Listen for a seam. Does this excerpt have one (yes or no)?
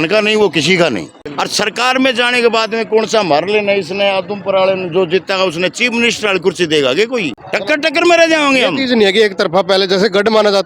yes